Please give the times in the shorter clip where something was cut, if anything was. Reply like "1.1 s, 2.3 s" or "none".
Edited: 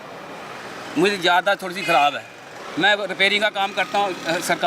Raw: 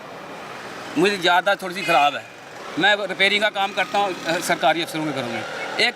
none